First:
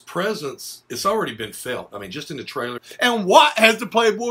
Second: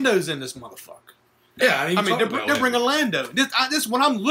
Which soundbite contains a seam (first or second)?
first